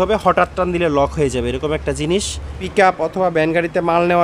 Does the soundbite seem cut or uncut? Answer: cut